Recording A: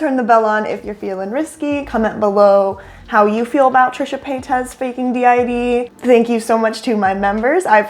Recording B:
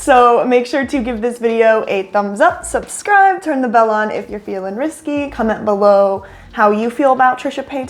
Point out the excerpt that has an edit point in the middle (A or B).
A